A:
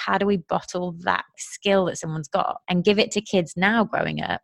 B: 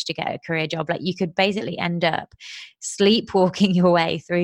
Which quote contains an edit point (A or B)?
A